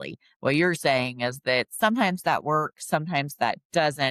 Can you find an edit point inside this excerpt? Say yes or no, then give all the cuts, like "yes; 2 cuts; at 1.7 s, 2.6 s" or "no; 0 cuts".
no; 0 cuts